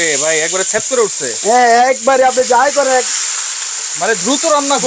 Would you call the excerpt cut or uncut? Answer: uncut